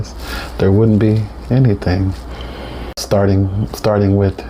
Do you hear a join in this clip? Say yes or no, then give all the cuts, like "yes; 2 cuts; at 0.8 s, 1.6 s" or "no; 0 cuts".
yes; 1 cut; at 3.0 s